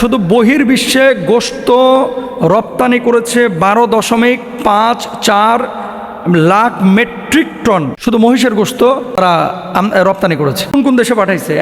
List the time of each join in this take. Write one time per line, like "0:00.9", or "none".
0:07.9
0:09.2
0:10.7